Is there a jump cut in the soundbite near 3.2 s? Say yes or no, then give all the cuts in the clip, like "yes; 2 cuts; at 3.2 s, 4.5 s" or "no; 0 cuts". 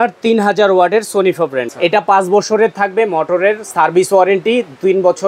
no; 1 cut; at 1.7 s